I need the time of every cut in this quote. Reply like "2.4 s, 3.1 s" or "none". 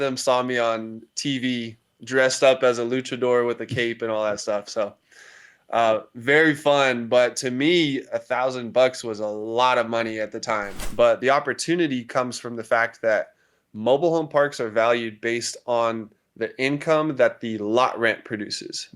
10.8 s